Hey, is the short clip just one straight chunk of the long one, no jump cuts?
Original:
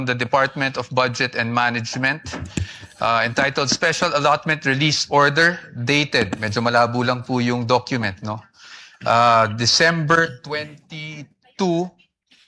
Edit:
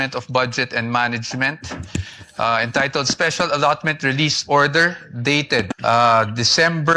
no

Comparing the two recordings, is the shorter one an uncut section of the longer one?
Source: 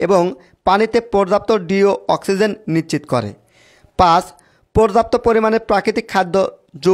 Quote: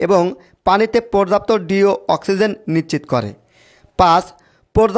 yes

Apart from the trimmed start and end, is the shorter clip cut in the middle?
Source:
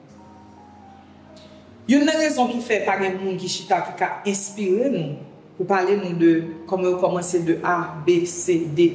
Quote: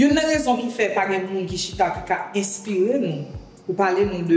no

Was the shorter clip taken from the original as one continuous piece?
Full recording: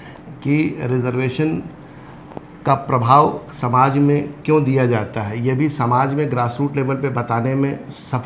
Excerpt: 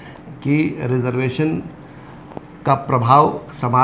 yes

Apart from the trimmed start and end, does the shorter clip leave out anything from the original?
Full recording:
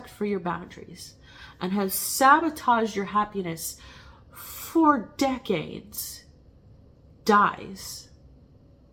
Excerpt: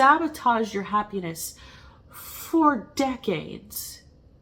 no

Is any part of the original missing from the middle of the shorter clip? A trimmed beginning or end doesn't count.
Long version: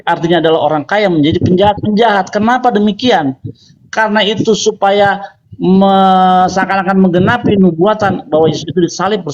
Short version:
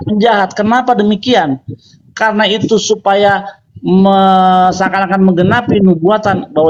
no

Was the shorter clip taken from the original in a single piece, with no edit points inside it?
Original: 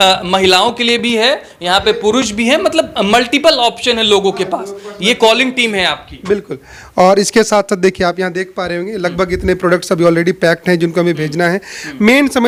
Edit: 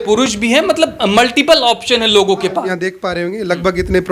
no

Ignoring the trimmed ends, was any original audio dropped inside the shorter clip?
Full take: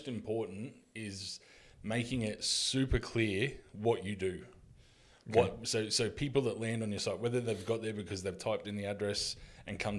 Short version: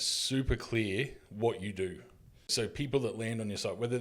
yes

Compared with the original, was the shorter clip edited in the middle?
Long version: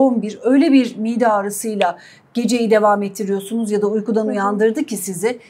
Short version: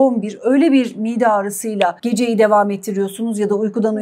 yes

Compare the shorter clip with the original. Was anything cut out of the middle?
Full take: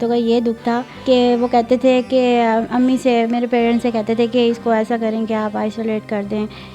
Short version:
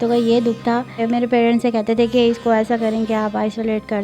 yes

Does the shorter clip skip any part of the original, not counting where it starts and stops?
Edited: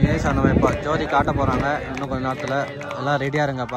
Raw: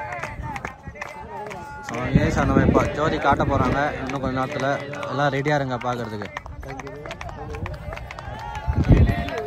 no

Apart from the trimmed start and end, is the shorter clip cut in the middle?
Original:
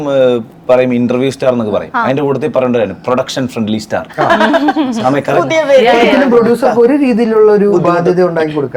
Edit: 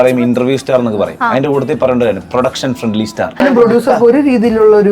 yes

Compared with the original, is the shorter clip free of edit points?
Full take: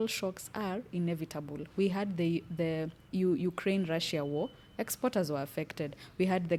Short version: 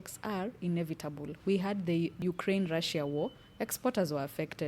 no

